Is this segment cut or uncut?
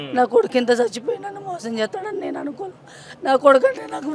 uncut